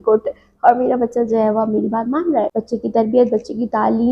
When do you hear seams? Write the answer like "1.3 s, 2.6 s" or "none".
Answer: 2.6 s